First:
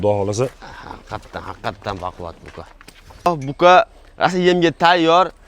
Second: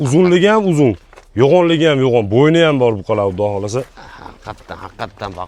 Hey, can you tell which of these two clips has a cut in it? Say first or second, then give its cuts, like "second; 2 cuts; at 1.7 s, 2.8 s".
first; 1 cut; at 3.3 s